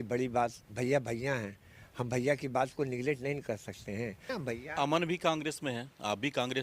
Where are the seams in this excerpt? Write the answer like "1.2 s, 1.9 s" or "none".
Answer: 4.2 s

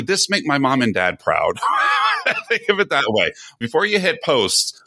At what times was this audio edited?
3.6 s

